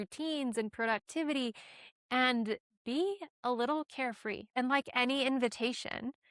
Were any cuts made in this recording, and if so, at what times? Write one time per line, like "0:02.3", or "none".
0:04.5